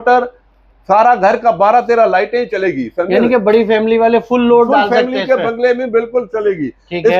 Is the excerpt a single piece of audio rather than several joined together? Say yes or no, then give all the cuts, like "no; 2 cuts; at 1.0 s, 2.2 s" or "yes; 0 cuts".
yes; 0 cuts